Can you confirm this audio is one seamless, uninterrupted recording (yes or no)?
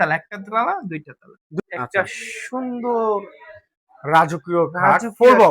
no